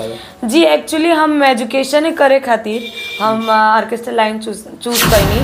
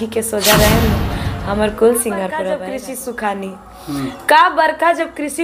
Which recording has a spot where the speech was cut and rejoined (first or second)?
second